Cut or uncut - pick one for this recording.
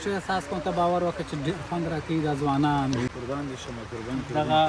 cut